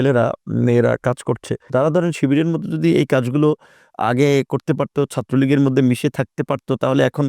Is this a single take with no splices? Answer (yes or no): no